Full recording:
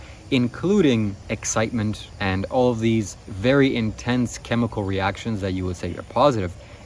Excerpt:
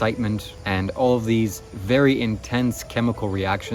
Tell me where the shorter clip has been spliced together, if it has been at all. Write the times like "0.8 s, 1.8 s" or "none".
none